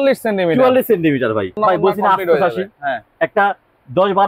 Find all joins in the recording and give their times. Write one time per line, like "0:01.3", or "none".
0:01.6